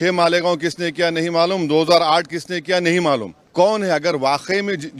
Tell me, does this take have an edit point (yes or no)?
yes